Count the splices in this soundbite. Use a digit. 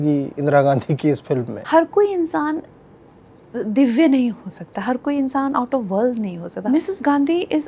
2